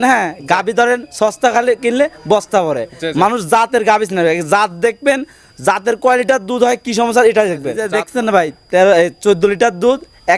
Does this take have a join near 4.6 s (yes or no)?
no